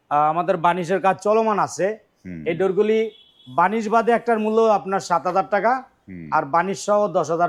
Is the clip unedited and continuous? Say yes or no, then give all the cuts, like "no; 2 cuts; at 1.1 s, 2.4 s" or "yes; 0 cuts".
yes; 0 cuts